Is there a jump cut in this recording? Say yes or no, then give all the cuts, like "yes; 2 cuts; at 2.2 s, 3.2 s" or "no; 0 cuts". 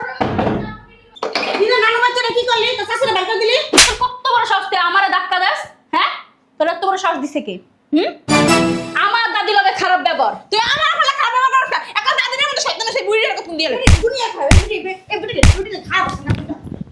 no; 0 cuts